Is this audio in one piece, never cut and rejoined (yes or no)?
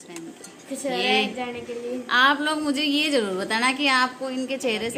yes